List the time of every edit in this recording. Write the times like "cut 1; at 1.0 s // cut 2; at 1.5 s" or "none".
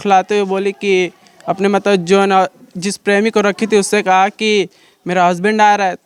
none